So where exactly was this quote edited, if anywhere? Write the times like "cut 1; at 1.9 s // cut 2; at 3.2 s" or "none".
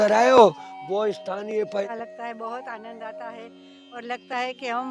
cut 1; at 1.8 s